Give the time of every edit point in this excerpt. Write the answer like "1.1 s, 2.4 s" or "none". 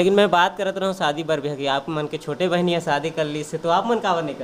none

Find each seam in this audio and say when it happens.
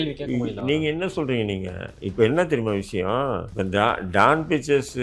3.5 s

